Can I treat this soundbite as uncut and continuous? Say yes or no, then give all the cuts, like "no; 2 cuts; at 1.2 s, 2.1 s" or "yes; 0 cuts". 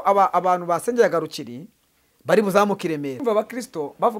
no; 1 cut; at 3.2 s